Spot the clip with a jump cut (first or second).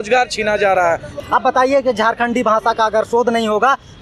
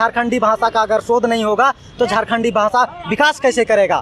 first